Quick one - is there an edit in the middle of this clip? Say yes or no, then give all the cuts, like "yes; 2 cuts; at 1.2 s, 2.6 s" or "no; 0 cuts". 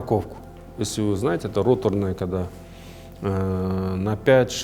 no; 0 cuts